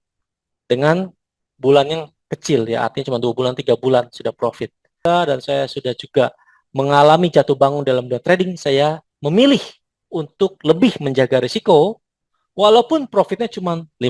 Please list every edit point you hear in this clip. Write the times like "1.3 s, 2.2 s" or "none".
5.0 s